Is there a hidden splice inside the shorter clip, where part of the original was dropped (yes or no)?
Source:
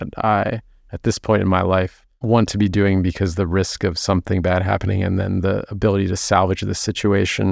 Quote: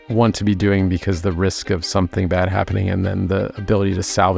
no